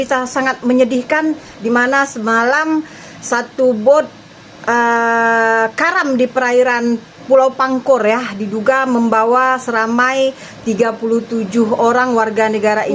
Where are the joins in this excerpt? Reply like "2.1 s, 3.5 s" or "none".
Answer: none